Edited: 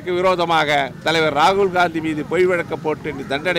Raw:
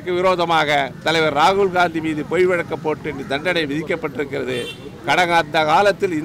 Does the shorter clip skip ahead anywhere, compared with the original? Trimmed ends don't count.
no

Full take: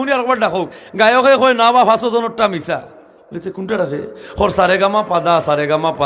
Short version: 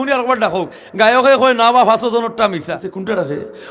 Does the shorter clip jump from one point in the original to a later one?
yes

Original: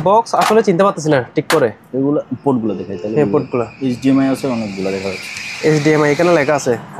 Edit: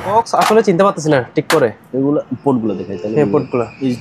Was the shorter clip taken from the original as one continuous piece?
yes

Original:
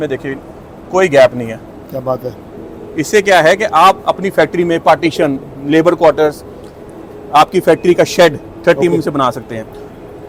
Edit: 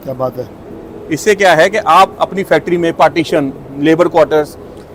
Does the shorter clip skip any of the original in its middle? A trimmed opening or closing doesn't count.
no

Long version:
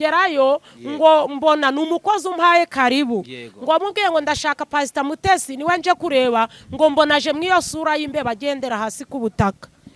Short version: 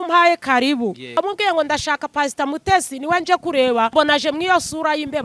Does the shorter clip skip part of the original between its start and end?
yes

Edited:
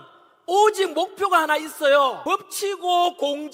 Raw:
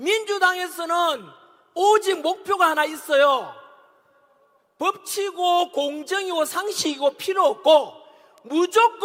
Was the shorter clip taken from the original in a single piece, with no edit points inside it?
no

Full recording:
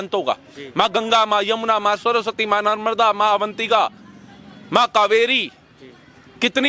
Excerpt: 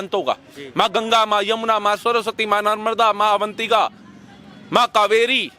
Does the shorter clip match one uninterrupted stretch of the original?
yes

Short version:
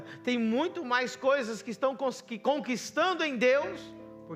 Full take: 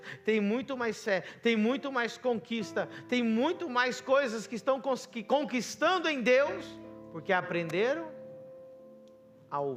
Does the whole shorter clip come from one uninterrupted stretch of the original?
yes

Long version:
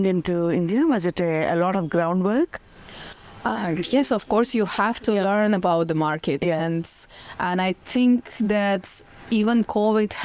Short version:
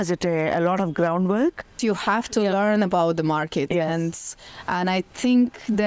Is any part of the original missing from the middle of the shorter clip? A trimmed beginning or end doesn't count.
yes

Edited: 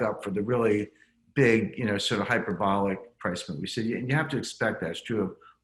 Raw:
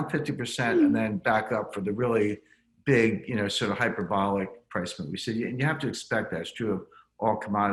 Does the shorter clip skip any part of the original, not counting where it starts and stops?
no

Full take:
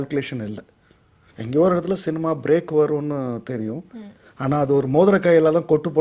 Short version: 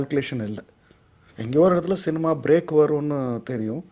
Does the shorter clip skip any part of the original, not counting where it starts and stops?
no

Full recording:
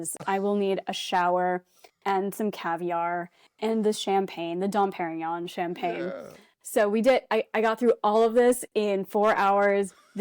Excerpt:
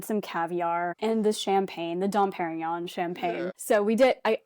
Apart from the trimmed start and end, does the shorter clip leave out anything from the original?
yes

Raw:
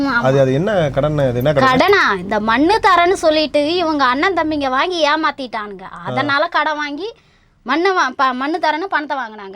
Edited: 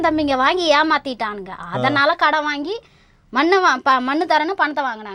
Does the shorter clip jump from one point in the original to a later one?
no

